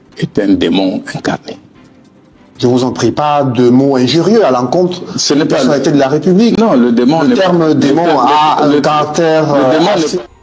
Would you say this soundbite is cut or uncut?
uncut